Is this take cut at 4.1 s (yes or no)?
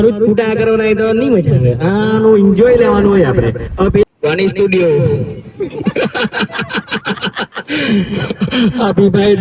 yes